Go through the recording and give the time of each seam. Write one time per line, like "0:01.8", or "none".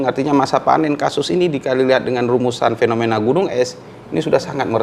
none